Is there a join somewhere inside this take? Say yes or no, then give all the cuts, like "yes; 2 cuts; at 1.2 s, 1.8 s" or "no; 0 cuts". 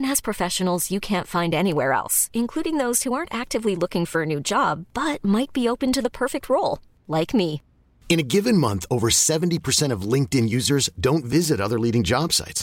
no; 0 cuts